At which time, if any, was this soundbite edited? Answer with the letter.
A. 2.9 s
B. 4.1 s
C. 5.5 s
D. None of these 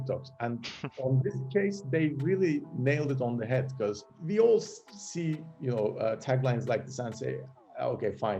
B